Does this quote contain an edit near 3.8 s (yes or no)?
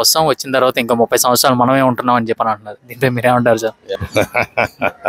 yes